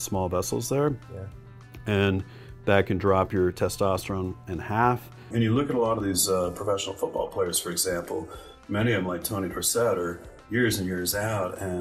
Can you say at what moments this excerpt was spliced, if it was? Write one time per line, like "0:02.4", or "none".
0:05.3